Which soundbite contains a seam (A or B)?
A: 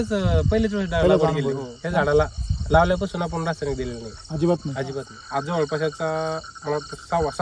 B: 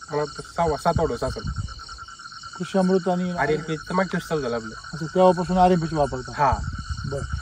A